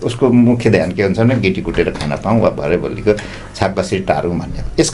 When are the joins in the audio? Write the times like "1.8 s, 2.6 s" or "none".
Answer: none